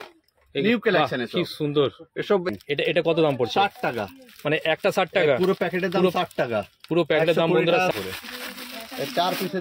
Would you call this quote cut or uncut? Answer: cut